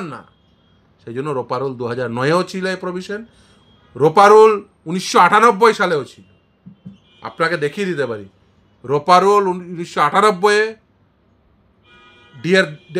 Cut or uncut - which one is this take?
uncut